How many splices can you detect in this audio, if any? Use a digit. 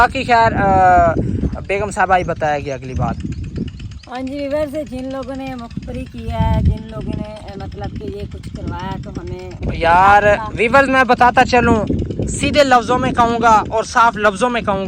1